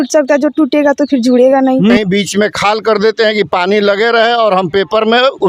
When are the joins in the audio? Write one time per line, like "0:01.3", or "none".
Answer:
0:02.0